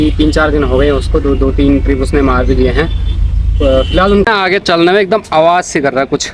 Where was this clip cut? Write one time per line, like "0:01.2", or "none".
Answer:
0:04.3